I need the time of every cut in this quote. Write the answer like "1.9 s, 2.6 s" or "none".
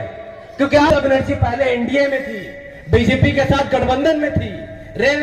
0.9 s